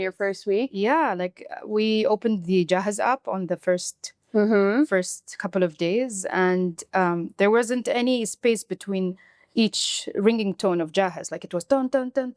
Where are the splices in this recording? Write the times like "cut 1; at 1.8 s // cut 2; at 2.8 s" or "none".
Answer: none